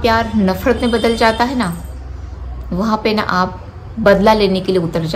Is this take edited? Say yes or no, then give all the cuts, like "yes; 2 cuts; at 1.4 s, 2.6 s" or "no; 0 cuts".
no; 0 cuts